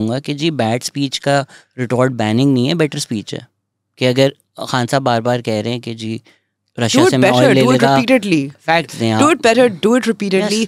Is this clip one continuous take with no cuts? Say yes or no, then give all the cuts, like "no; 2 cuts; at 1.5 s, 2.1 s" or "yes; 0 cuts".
yes; 0 cuts